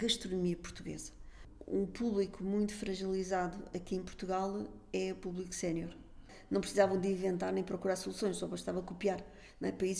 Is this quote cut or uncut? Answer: cut